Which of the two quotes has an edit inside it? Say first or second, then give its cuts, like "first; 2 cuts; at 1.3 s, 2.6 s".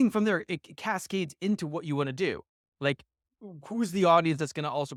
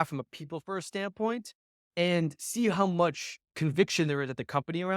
second; 1 cut; at 3.5 s